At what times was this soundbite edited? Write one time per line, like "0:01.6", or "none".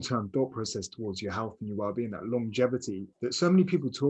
0:03.0